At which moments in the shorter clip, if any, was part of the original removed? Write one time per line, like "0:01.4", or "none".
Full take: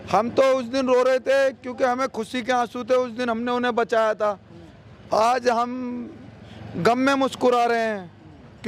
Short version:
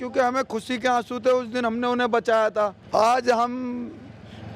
0:02.8